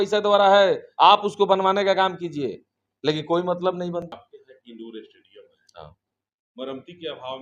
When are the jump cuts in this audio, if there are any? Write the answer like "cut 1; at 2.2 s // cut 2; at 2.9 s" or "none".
cut 1; at 4.1 s